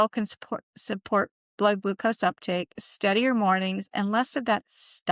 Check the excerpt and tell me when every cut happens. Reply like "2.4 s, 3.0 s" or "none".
none